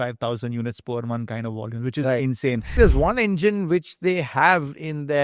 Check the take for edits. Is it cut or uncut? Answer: cut